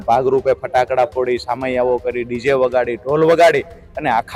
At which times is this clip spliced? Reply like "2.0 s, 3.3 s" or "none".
none